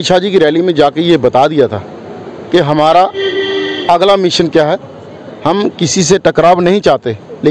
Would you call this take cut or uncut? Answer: uncut